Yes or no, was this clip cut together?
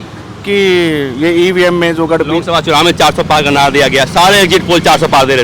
no